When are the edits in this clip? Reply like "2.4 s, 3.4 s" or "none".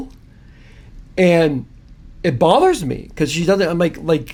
none